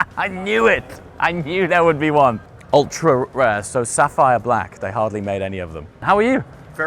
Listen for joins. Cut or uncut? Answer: uncut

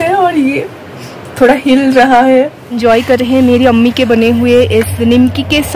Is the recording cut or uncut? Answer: cut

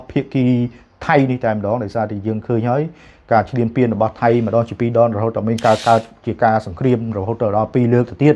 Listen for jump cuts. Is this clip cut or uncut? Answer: uncut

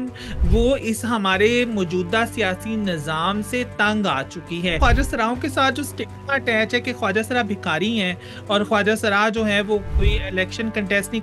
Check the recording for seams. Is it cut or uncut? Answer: cut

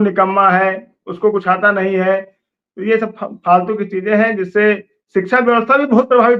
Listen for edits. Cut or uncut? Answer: uncut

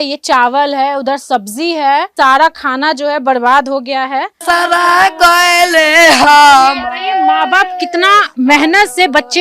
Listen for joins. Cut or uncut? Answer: cut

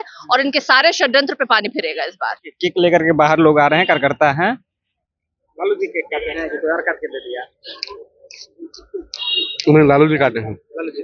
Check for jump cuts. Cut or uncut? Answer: uncut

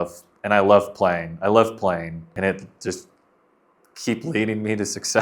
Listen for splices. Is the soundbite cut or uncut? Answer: cut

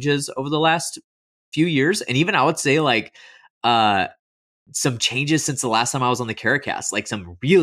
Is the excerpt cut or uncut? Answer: uncut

